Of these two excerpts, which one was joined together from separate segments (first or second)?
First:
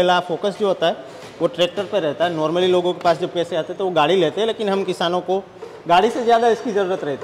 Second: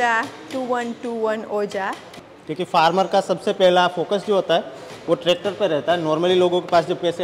second